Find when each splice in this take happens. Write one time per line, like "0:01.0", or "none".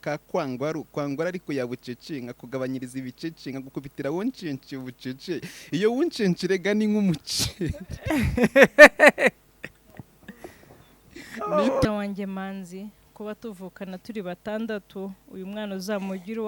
0:11.8